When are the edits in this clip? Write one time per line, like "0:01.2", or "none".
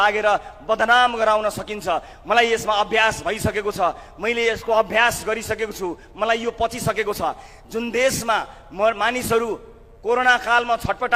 none